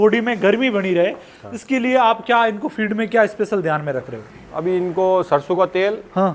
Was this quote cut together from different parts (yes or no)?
no